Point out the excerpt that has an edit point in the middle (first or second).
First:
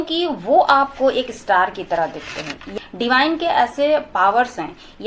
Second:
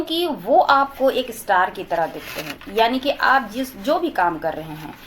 first